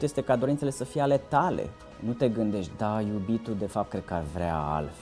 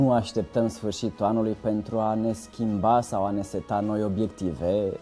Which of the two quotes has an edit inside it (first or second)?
first